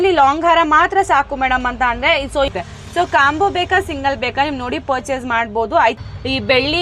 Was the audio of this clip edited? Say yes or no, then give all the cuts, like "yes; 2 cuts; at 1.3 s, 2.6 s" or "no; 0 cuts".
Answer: yes; 2 cuts; at 2.5 s, 6.0 s